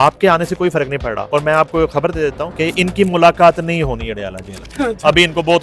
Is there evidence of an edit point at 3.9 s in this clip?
no; 2 cuts; at 1.2 s, 2.5 s

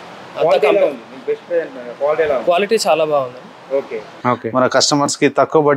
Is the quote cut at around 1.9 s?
no; 1 cut; at 4.1 s

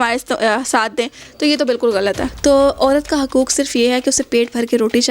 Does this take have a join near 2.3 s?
yes; 1 cut; at 2.3 s

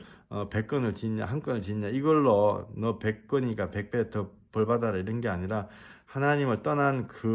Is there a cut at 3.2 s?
no; 0 cuts

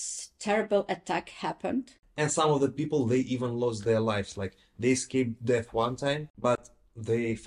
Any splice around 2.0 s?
yes; 2 cuts; at 2.0 s, 6.3 s

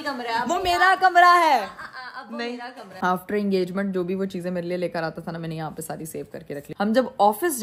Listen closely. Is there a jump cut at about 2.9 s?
yes; 2 cuts; at 2.9 s, 6.7 s

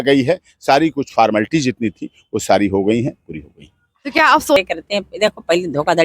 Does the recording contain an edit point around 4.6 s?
yes; 1 cut; at 4.6 s

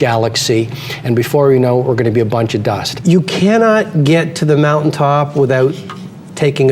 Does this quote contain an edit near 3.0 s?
yes; 1 cut; at 3.0 s

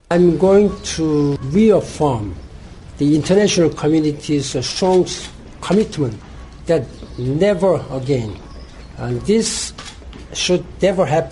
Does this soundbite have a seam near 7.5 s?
no; 1 cut; at 1.4 s

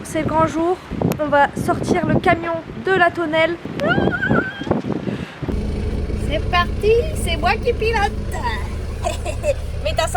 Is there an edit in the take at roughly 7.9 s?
no; 2 cuts; at 3.7 s, 5.5 s

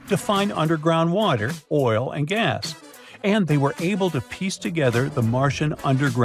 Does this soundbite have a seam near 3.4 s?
no; 0 cuts

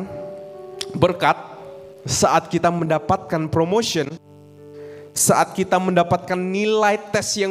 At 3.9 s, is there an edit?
no; 0 cuts

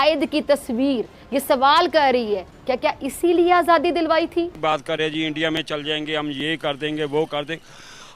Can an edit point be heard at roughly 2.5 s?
no; 1 cut; at 4.6 s

